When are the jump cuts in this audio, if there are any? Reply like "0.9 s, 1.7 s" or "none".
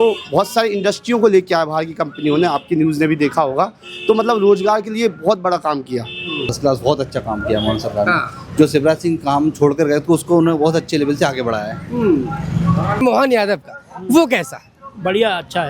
6.5 s, 13.0 s